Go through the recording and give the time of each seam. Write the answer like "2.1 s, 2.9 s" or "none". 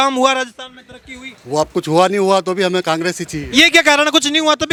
none